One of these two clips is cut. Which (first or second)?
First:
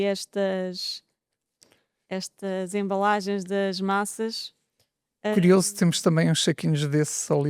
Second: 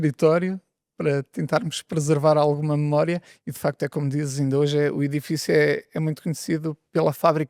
first